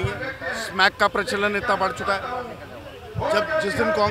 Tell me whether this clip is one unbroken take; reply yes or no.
yes